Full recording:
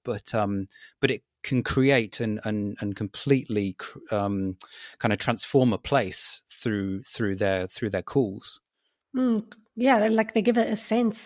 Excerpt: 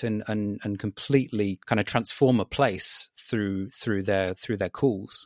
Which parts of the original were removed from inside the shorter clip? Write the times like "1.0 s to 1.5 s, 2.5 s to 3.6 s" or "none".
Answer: 3.8 s to 4.9 s